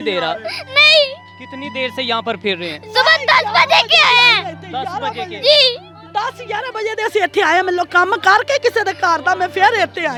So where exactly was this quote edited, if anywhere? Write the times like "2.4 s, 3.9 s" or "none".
none